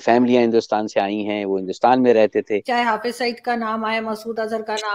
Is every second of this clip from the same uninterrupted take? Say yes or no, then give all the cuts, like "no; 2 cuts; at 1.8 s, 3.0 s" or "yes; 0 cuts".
no; 1 cut; at 2.6 s